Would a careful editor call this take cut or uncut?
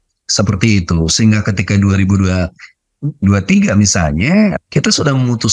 cut